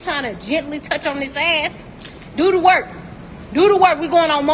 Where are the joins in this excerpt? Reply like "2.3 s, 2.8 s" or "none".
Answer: none

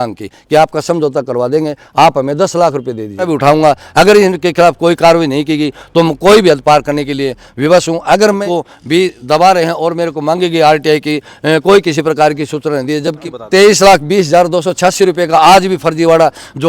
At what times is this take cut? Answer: 3.3 s, 8.4 s, 13.3 s

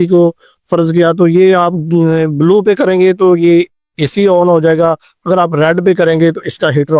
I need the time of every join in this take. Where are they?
none

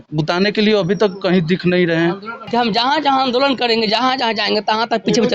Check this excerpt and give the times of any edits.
2.4 s

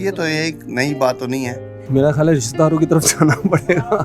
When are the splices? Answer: none

